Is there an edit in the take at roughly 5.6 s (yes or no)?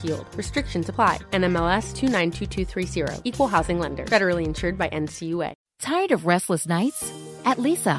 yes